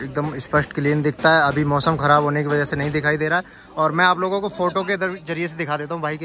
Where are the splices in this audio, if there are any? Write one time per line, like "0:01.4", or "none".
none